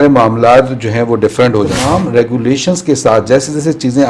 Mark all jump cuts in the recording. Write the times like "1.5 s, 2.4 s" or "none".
1.8 s